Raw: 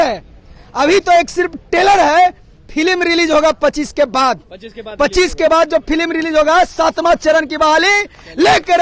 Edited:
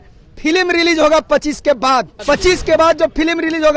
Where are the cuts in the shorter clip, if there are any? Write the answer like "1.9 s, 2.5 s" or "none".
2.1 s